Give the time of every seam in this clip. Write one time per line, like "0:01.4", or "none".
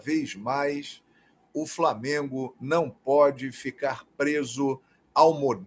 none